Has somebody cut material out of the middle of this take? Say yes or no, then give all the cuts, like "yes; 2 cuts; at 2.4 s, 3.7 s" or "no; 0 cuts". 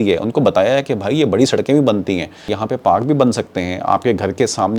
yes; 1 cut; at 2.5 s